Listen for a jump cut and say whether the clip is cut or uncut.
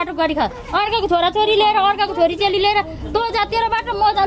uncut